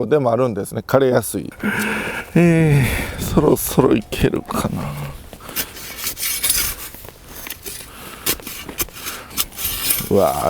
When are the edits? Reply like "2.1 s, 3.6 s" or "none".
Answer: 1.5 s